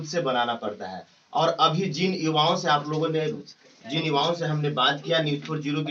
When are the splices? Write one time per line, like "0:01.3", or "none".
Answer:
none